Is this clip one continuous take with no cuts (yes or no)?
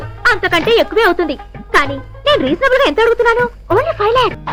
yes